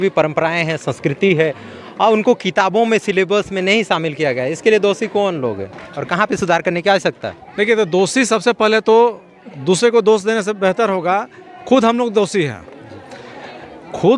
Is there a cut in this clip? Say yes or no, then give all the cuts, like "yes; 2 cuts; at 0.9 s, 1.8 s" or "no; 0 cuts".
no; 0 cuts